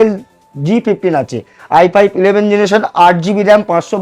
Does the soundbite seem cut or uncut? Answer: uncut